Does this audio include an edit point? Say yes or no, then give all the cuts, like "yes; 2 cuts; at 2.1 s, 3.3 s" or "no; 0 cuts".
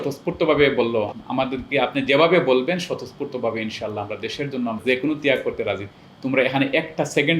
yes; 3 cuts; at 1.1 s, 4.8 s, 5.9 s